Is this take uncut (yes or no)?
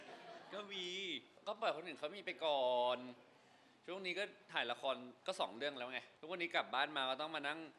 no